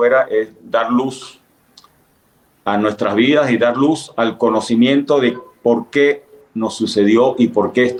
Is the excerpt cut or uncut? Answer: uncut